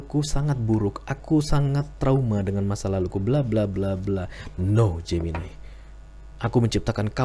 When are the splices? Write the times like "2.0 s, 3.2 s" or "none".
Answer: none

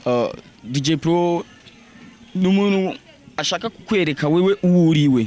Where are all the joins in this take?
none

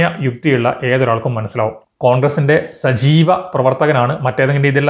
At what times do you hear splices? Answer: 1.8 s

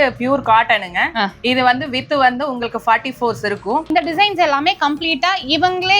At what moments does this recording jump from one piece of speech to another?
3.9 s

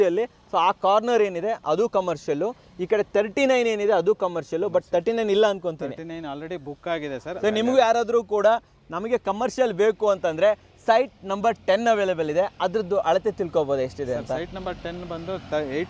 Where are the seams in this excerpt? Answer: none

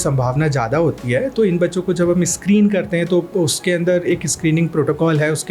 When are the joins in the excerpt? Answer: none

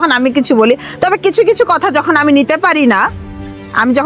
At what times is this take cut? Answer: none

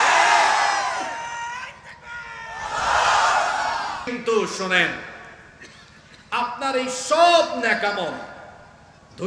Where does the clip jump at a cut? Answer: 4.1 s

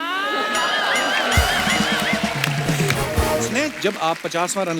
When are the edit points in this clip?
3.5 s

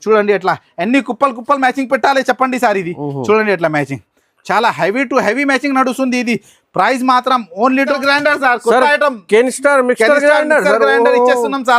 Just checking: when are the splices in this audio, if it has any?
7.9 s

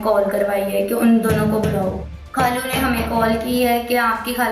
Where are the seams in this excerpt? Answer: 2.1 s

